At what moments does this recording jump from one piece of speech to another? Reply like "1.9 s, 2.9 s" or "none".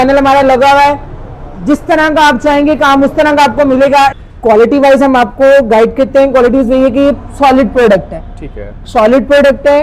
4.2 s